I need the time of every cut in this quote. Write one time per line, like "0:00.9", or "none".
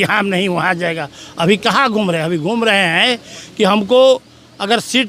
none